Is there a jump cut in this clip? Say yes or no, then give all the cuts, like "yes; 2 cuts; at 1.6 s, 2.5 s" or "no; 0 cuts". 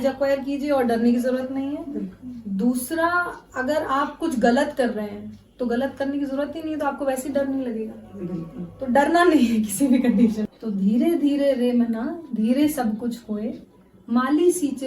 yes; 1 cut; at 10.5 s